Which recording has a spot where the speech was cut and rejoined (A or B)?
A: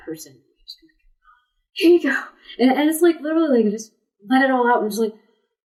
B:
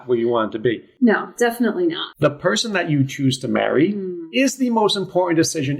B